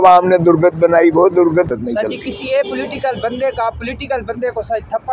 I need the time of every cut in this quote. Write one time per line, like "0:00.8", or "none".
0:01.7